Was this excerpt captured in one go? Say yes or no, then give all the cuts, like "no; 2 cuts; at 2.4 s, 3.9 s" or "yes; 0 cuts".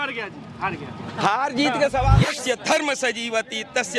no; 1 cut; at 2.4 s